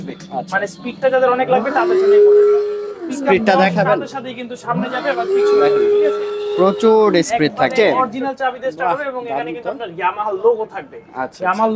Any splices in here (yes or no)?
yes